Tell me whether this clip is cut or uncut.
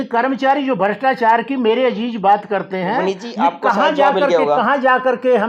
uncut